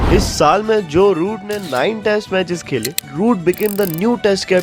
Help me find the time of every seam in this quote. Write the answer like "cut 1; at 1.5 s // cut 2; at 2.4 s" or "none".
cut 1; at 3.0 s